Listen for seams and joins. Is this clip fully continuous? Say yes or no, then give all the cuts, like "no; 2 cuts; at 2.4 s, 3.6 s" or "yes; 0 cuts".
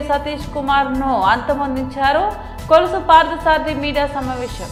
yes; 0 cuts